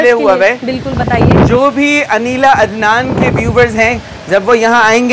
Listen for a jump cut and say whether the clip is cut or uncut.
uncut